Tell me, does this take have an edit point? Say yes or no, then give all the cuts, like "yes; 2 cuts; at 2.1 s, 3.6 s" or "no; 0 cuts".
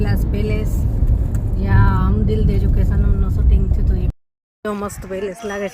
yes; 1 cut; at 4.1 s